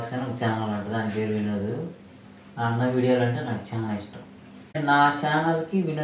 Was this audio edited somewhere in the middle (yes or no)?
yes